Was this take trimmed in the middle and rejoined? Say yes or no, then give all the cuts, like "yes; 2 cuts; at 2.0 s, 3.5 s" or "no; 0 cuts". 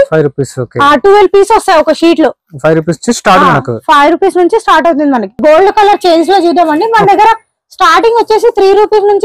yes; 1 cut; at 5.4 s